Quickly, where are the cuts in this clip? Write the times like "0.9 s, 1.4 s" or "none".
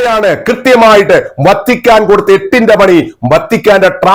none